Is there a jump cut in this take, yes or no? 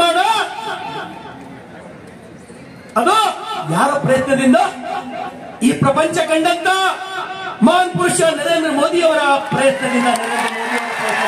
no